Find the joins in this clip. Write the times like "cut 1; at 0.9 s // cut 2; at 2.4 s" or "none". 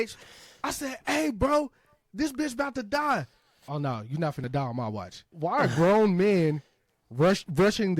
cut 1; at 3.6 s // cut 2; at 5.3 s